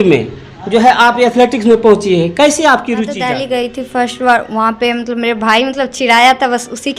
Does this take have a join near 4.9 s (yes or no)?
no